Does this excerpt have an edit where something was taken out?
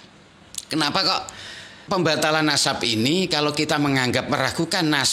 no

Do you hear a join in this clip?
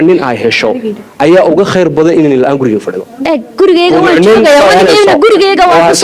no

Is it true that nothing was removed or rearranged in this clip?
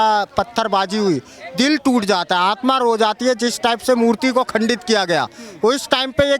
yes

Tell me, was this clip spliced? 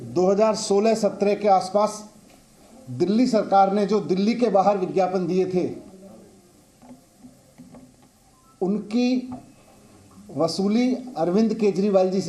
no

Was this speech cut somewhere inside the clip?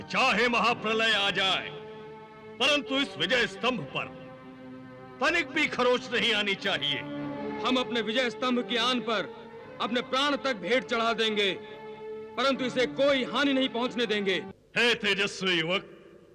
yes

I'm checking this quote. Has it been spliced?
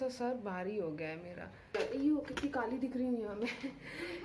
yes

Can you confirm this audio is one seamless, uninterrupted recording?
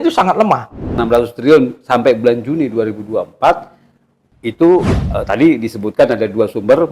no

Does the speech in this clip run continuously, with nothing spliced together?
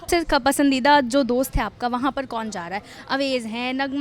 yes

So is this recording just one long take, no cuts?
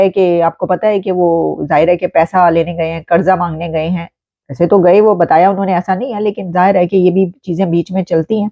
yes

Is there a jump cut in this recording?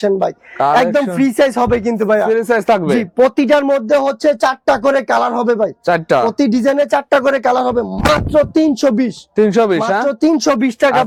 no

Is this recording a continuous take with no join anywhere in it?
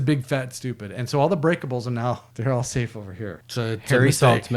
no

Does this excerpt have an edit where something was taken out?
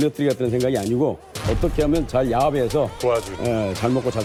no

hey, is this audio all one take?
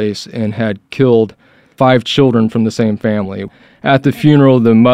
no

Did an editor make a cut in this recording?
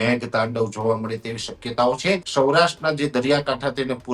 yes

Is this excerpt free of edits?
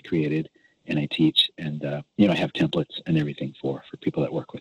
yes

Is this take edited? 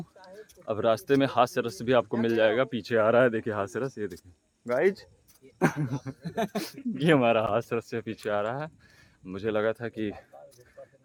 no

